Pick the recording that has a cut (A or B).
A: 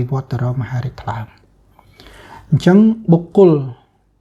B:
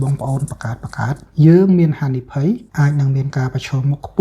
B